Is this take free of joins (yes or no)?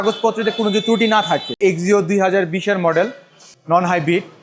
no